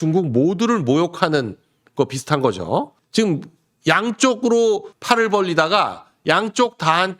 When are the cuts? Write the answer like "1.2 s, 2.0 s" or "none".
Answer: 3.0 s, 4.9 s